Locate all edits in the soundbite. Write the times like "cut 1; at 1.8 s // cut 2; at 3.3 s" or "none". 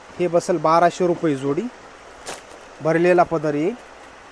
none